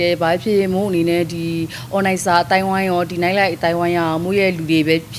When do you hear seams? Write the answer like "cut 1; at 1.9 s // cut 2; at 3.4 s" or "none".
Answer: none